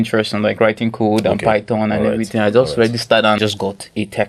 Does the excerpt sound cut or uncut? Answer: cut